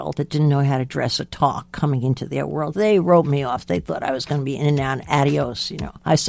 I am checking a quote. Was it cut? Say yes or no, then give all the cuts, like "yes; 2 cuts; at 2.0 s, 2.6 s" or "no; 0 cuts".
no; 0 cuts